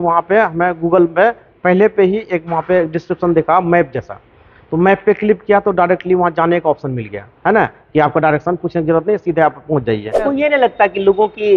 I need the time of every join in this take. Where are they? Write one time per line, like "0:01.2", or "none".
0:10.3